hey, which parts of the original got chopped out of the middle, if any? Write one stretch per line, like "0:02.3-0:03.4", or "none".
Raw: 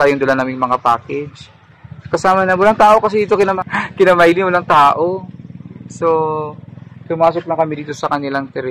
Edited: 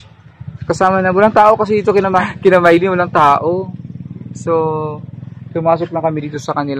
0:03.7-0:03.8